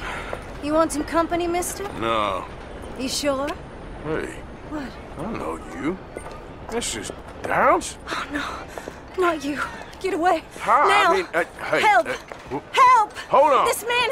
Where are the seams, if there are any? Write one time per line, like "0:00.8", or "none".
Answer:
0:03.6